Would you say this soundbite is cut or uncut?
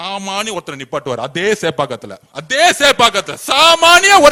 uncut